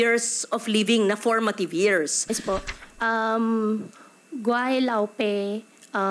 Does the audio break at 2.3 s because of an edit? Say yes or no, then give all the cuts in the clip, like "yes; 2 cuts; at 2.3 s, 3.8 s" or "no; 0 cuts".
yes; 1 cut; at 2.3 s